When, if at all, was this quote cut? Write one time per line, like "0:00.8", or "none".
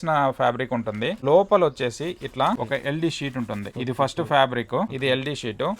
0:01.2
0:02.6
0:03.7
0:04.9

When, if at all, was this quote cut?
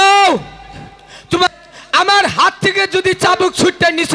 0:01.5

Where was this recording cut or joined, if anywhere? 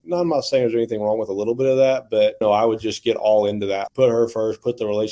0:02.4
0:03.8

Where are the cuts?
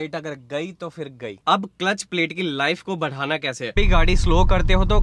0:01.4
0:03.7

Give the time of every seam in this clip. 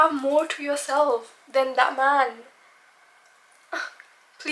none

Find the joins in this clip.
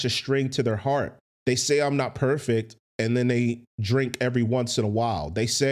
0:01.2

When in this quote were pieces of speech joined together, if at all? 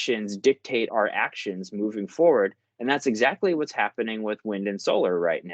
0:00.9

